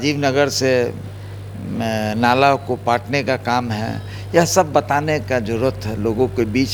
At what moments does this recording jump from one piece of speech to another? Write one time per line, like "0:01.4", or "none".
none